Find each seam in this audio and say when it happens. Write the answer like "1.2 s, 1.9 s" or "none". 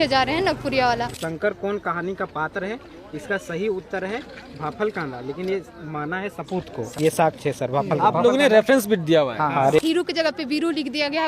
1.2 s, 6.9 s, 9.8 s